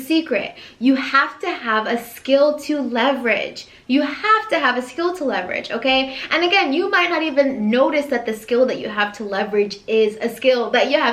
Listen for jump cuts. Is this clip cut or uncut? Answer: uncut